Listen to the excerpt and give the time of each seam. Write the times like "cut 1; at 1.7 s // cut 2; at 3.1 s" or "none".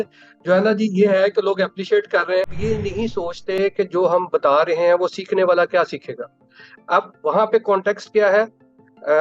cut 1; at 2.5 s